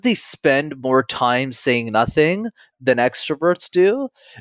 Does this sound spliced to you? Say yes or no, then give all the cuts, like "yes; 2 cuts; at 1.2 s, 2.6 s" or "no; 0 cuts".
yes; 1 cut; at 2.7 s